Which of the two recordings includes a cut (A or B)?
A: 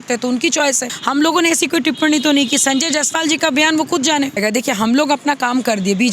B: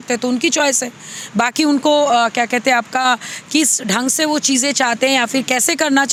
A